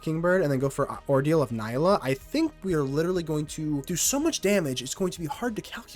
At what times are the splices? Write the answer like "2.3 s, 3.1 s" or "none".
3.9 s